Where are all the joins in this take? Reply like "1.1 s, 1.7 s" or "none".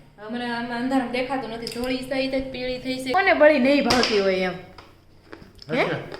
3.1 s